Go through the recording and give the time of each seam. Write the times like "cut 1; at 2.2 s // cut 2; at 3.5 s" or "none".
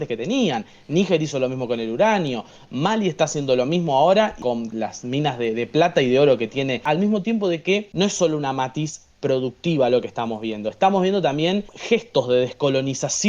cut 1; at 4.4 s // cut 2; at 6.8 s // cut 3; at 7.9 s // cut 4; at 11.7 s